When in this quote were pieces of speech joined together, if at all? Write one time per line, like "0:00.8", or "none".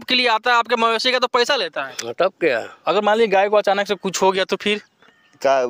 0:02.7